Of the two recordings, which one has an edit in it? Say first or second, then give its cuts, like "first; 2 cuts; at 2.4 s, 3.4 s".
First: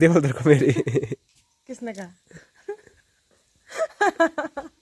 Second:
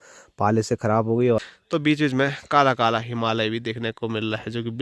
second; 1 cut; at 1.4 s